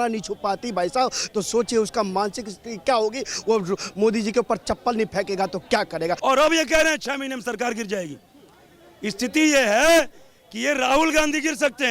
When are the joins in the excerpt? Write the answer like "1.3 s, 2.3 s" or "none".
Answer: 6.2 s